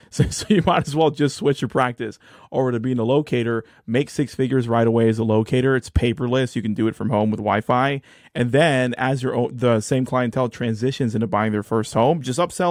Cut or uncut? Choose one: uncut